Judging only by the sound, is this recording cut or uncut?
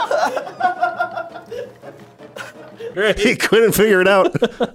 cut